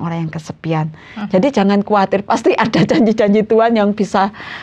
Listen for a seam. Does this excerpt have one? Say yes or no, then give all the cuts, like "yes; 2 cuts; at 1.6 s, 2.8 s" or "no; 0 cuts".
no; 0 cuts